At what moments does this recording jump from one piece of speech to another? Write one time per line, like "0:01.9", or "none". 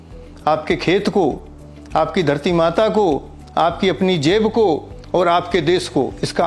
none